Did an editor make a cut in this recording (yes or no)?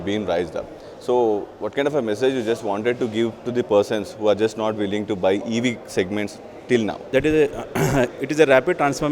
yes